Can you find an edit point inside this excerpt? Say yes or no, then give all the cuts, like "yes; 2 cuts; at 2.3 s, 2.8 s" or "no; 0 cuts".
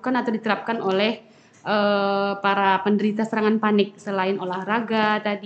no; 0 cuts